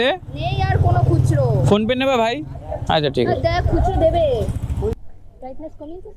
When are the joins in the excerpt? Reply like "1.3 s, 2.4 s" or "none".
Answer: 4.9 s